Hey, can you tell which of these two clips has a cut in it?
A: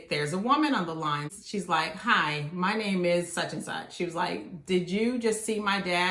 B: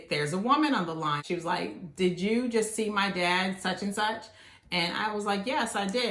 B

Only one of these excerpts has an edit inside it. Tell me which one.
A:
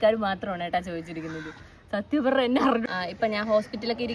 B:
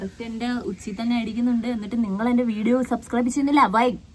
A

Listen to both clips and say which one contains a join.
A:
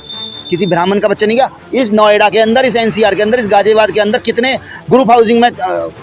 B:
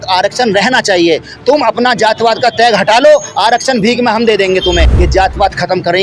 B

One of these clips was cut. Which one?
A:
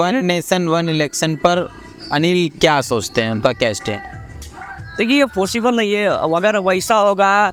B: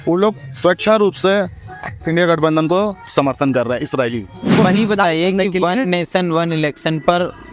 B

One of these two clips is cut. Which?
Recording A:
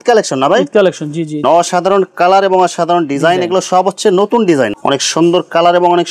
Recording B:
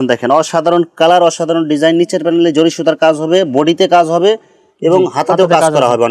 A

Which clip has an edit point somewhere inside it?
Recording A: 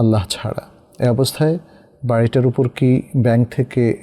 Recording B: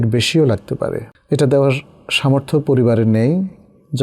B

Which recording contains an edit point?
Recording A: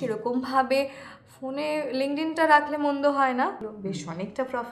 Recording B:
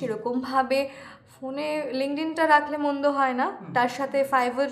A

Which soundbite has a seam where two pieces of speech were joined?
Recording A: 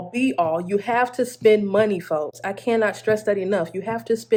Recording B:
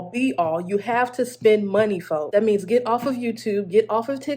B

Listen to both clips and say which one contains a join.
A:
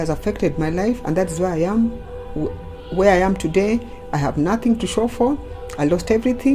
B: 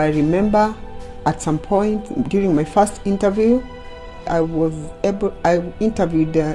B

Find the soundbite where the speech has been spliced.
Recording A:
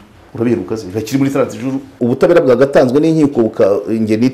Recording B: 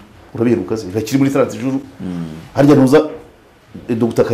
A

